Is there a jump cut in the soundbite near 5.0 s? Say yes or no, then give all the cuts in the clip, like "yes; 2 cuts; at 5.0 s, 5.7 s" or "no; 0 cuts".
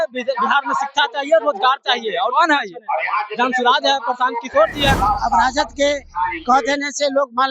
yes; 1 cut; at 5.0 s